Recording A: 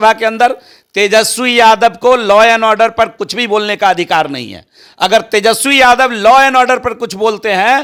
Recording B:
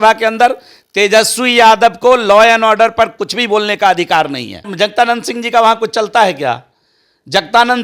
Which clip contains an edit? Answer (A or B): B